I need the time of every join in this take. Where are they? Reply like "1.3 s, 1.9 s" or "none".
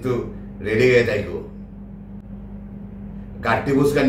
none